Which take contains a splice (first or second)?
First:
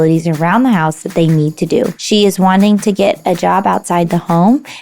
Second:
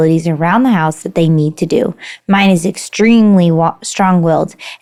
first